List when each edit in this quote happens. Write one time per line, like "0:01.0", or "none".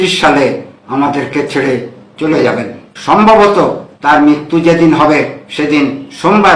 0:02.9